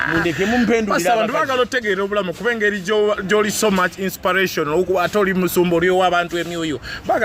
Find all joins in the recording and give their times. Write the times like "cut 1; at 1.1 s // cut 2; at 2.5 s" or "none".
none